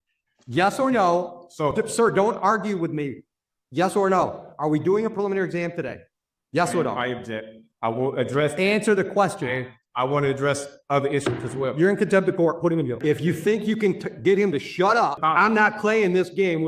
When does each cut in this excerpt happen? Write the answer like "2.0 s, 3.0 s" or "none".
13.0 s, 15.2 s